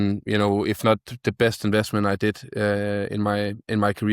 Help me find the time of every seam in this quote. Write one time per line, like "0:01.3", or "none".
none

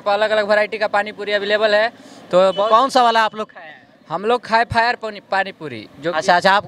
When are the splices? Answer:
none

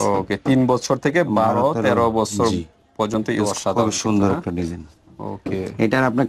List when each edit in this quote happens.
0:03.4

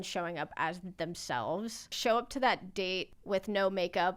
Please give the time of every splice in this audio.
0:01.9
0:03.1

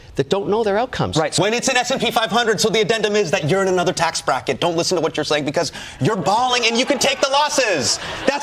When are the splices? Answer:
0:01.3

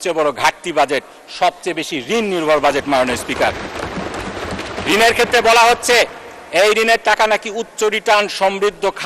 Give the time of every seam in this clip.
none

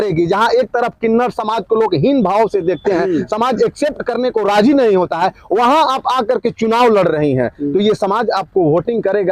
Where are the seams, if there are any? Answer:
none

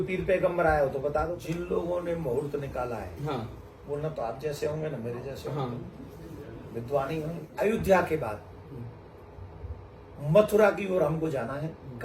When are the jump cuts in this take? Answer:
0:01.3
0:07.4

